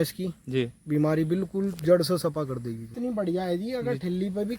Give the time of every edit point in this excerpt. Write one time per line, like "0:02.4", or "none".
0:02.9

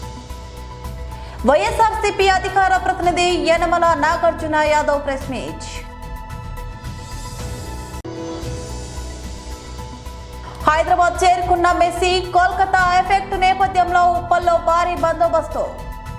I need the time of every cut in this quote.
none

